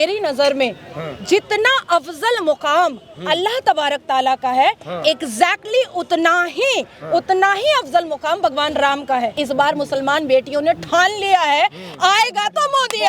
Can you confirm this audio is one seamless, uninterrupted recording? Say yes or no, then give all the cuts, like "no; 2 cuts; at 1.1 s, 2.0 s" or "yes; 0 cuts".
no; 1 cut; at 9.3 s